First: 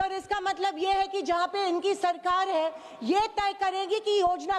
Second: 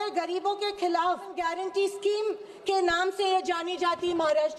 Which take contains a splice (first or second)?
second